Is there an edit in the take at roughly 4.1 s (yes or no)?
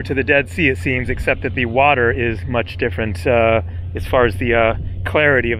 no